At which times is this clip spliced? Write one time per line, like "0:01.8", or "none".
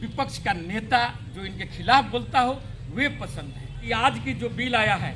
0:03.8